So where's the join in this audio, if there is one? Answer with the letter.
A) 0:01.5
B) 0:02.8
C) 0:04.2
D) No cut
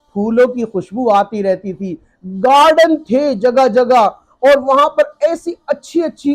D